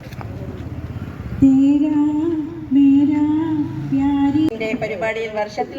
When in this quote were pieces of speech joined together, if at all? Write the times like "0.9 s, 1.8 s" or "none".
4.5 s